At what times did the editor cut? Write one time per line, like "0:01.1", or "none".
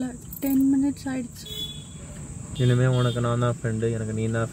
0:02.4